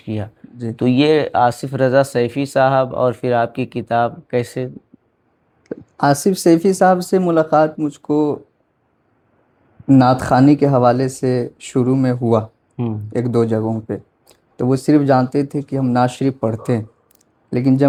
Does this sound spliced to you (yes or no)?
no